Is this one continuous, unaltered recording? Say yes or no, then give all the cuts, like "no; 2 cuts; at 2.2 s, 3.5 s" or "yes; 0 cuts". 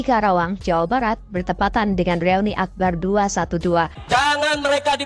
no; 1 cut; at 4.0 s